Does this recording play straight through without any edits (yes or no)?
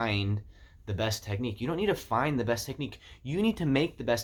yes